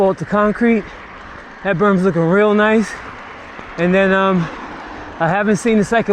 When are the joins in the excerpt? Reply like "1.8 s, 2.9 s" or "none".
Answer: none

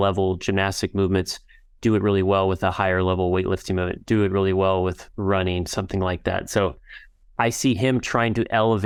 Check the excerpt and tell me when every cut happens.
none

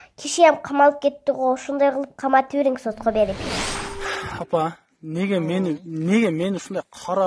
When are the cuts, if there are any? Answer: 3.5 s

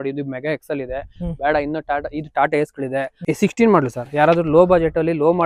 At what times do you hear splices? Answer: 3.2 s

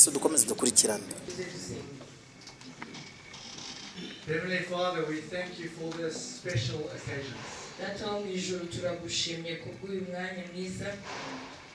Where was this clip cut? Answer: 1.2 s

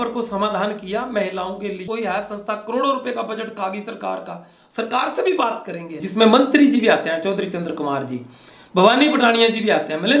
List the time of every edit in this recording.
1.8 s, 6.0 s

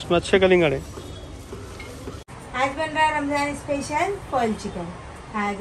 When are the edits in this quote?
2.1 s

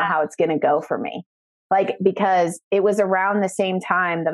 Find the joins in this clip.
none

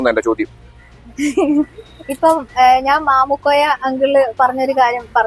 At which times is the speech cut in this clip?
none

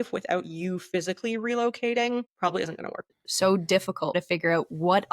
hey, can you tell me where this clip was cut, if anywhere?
3.1 s, 4.1 s

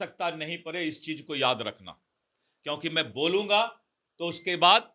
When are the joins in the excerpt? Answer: none

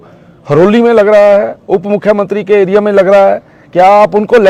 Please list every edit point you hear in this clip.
none

